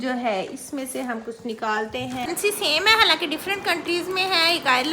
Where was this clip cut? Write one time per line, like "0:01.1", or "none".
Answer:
0:02.3